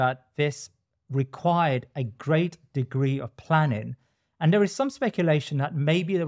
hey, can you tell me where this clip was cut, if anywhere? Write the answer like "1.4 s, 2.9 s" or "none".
none